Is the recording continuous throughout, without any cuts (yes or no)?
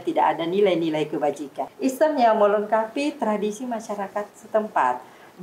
no